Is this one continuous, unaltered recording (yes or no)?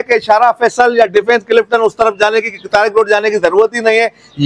yes